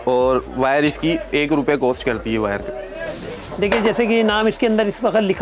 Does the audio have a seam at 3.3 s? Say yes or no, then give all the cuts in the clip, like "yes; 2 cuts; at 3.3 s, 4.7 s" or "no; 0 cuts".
yes; 1 cut; at 3.3 s